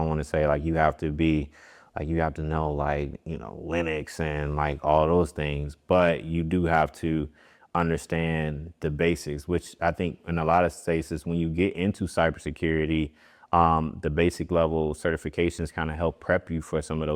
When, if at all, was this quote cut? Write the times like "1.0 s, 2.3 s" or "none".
none